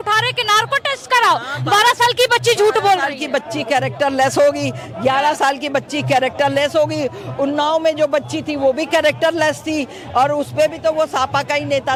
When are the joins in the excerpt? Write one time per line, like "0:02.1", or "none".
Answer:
none